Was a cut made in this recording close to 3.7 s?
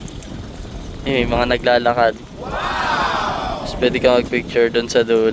yes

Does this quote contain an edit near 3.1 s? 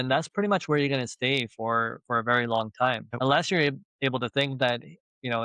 yes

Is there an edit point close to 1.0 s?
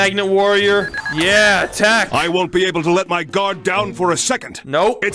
yes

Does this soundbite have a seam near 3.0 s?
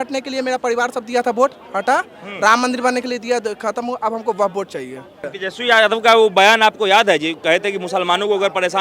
no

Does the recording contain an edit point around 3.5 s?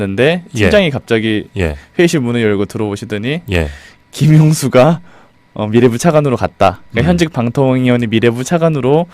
yes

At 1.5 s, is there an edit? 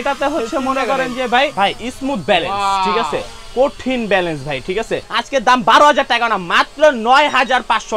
yes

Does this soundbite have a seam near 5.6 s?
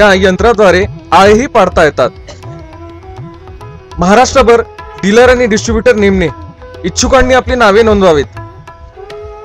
no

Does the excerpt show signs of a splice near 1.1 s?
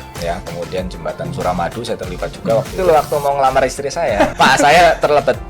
no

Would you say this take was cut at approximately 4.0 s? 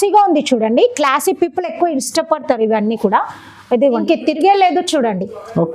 yes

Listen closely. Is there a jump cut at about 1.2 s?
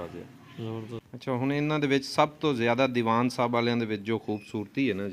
yes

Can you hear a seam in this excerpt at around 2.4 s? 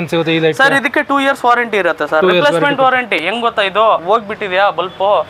no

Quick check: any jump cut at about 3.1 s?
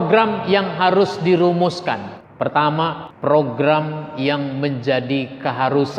yes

